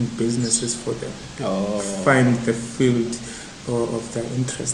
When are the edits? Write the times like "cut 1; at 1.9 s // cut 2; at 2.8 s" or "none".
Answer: none